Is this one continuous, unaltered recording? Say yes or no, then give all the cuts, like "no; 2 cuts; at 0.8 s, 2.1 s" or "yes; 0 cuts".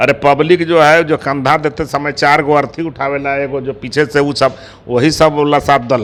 yes; 0 cuts